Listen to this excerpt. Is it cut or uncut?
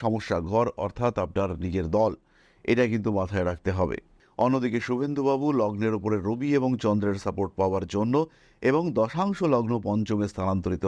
cut